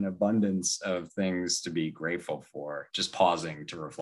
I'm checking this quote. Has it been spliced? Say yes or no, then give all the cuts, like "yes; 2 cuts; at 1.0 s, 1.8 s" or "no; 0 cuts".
yes; 1 cut; at 2.9 s